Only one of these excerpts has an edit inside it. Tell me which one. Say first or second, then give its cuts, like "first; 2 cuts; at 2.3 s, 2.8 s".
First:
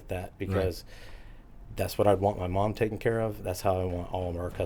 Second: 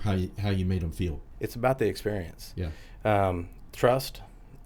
second; 1 cut; at 1.2 s